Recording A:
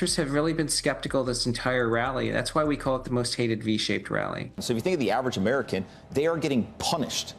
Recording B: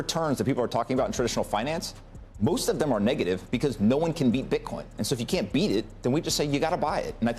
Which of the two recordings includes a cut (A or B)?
A